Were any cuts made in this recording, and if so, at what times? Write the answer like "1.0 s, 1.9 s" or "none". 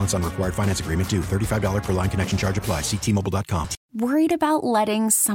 3.8 s